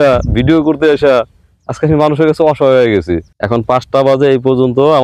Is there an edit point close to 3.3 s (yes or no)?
yes